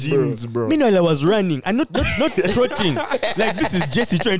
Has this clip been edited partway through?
no; 0 cuts

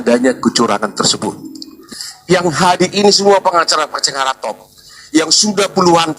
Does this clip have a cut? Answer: yes; 1 cut; at 1.7 s

